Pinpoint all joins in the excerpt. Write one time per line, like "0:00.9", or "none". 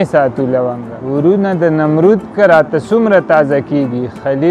0:00.9